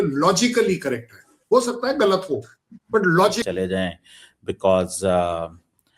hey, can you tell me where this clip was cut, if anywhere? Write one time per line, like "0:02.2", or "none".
0:03.4

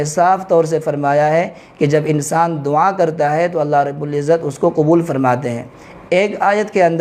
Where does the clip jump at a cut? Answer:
none

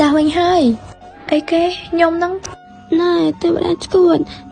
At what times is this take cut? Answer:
0:02.4

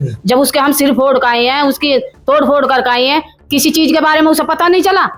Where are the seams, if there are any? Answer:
none

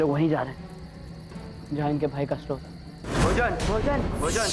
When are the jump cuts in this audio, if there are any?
0:03.2

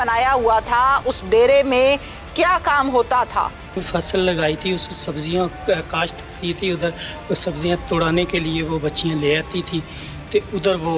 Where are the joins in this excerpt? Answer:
0:03.8

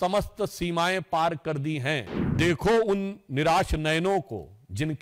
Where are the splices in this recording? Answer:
0:02.2

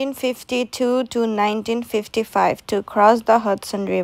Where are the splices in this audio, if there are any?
none

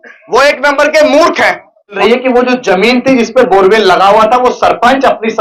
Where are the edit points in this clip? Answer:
0:02.0

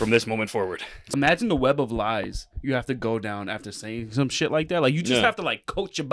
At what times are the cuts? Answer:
0:01.1

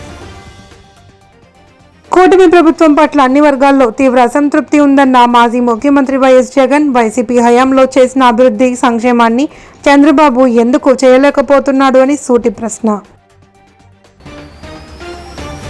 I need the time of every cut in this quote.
none

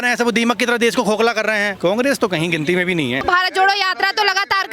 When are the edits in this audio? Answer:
0:01.7
0:03.2

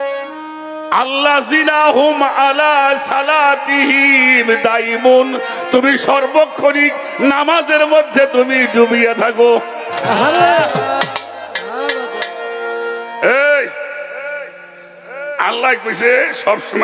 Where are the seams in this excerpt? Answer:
none

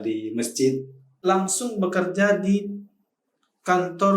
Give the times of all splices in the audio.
0:01.1

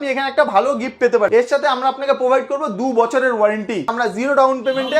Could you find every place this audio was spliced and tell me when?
0:01.3
0:03.9

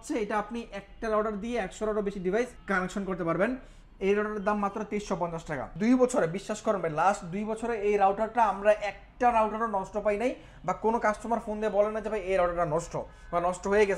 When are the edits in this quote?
0:02.6
0:05.7

